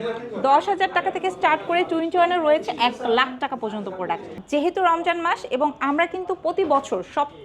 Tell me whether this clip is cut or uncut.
cut